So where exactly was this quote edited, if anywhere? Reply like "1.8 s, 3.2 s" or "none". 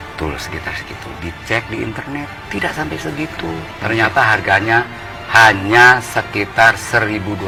none

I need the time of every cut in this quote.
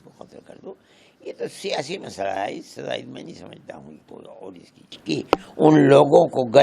5.0 s

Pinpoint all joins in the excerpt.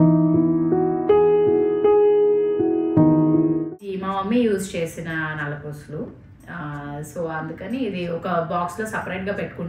none

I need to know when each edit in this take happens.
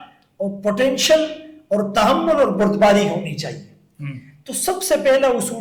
none

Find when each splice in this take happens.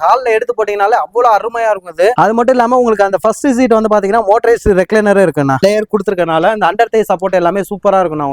2.1 s, 5.6 s

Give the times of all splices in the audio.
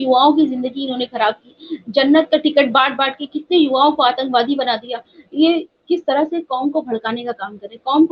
none

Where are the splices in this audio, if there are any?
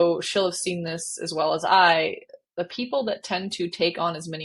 none

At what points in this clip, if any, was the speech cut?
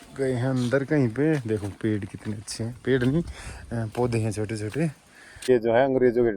5.5 s

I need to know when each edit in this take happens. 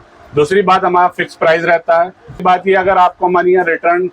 2.4 s

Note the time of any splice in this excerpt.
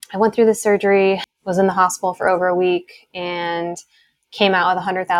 1.3 s

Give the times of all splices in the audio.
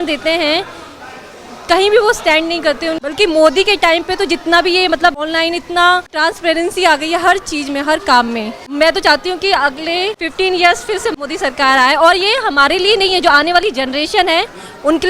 3.0 s, 5.2 s, 6.1 s, 8.6 s, 10.2 s, 11.1 s

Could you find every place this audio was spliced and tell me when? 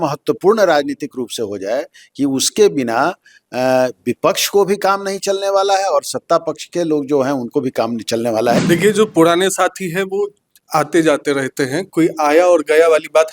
8.6 s

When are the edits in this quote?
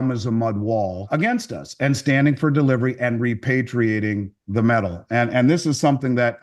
1.0 s

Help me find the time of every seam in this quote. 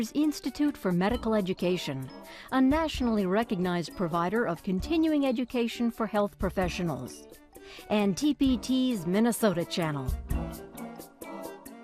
10.1 s

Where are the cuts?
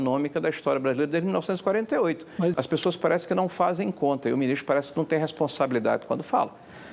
2.5 s

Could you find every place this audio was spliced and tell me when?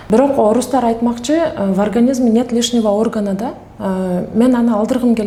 none

